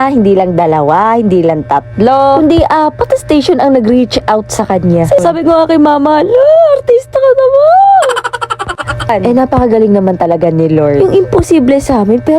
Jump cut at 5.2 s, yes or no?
yes